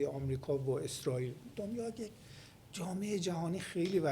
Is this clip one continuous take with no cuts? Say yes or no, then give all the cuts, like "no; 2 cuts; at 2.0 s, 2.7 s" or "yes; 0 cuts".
no; 1 cut; at 1.4 s